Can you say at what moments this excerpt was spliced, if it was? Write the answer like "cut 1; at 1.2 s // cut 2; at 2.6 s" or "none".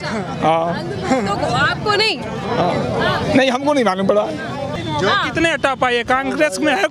cut 1; at 4.8 s